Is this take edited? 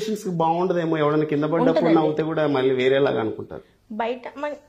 no; 0 cuts

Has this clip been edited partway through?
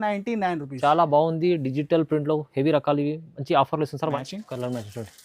yes; 1 cut; at 4.2 s

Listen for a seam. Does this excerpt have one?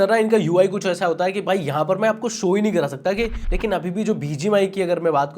yes; 1 cut; at 3.4 s

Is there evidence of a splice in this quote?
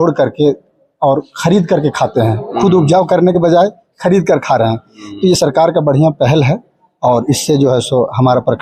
no; 0 cuts

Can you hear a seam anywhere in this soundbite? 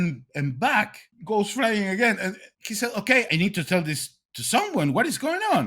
yes; 3 cuts; at 1.1 s, 2.5 s, 3.3 s

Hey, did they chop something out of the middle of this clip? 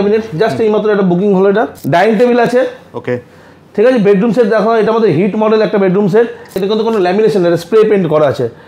yes; 2 cuts; at 1.8 s, 6.6 s

